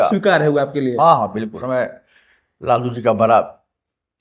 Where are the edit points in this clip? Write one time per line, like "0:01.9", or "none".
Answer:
0:01.6